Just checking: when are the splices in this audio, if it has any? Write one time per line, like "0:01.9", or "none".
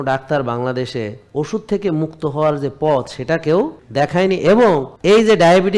0:03.8
0:04.9